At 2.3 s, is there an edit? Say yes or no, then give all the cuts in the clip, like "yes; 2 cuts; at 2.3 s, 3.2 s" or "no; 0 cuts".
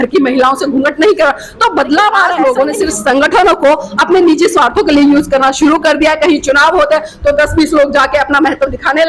yes; 1 cut; at 2.3 s